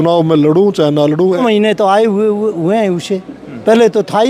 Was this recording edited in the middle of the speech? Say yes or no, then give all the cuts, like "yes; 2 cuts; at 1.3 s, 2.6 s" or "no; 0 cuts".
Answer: yes; 1 cut; at 1.4 s